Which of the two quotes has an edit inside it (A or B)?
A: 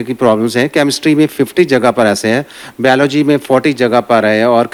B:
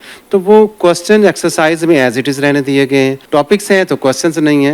B